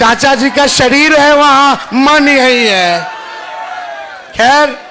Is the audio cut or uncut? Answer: uncut